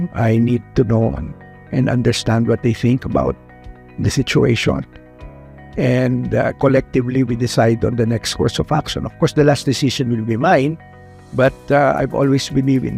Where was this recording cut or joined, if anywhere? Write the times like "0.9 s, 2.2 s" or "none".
none